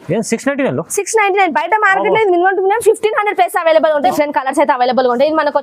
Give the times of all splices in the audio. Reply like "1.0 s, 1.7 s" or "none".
4.1 s